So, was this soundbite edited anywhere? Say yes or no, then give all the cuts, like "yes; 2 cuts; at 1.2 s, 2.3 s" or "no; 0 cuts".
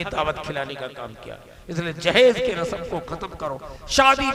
no; 0 cuts